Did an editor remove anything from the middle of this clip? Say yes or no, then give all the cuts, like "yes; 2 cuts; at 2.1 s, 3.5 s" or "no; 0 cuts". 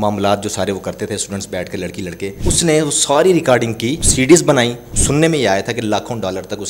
yes; 3 cuts; at 2.4 s, 4.0 s, 4.8 s